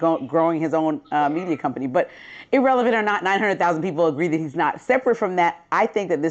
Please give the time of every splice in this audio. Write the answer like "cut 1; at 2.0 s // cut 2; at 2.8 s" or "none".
cut 1; at 1.0 s